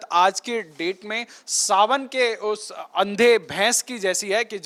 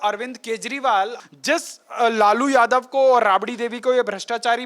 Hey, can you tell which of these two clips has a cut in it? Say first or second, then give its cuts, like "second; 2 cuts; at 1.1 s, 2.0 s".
second; 1 cut; at 1.1 s